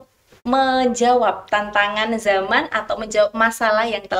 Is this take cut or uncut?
uncut